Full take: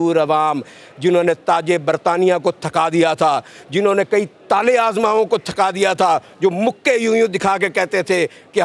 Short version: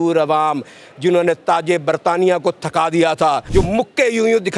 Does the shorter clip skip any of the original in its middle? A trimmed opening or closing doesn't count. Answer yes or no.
yes